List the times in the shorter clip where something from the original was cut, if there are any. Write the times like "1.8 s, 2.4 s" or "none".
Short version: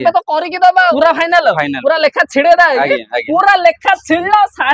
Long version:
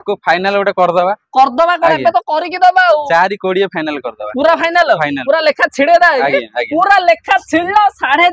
0.9 s